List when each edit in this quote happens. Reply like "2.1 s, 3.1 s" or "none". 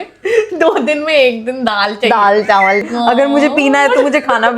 2.8 s

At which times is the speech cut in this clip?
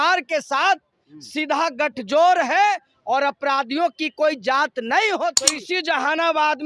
5.6 s

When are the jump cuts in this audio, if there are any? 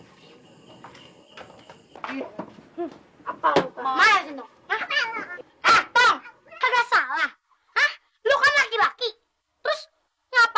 1.9 s

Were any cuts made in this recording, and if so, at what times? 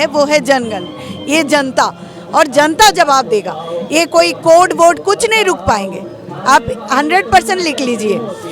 none

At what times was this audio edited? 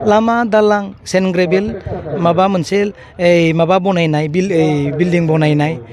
none

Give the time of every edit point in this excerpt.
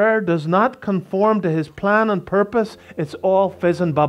none

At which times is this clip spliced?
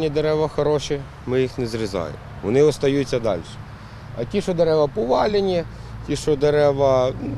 none

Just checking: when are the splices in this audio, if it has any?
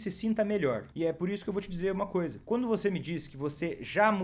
0.9 s, 2.4 s

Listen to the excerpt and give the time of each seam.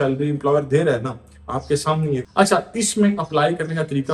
2.2 s

